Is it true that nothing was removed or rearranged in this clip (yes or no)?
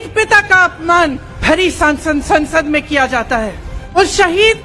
no